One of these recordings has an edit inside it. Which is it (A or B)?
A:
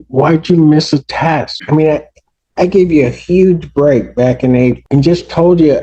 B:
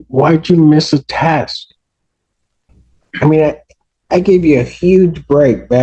A